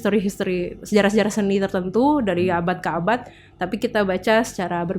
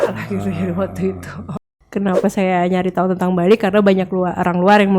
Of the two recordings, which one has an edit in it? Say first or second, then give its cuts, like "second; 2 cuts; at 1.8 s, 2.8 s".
second; 1 cut; at 1.8 s